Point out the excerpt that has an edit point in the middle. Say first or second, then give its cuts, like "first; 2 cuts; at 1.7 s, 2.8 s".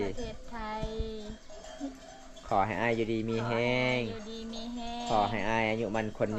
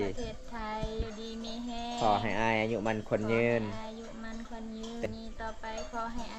second; 2 cuts; at 1.0 s, 5.0 s